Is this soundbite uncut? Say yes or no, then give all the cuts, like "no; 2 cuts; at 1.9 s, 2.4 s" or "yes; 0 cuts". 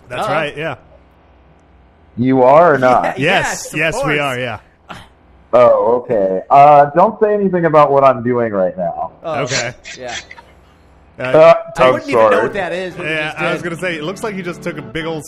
yes; 0 cuts